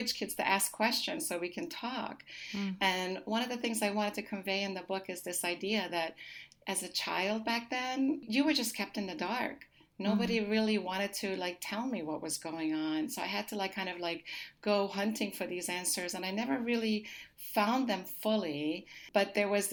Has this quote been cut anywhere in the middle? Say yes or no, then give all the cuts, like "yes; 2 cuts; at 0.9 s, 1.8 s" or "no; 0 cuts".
no; 0 cuts